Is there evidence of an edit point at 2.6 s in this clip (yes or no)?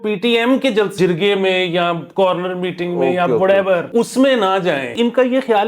no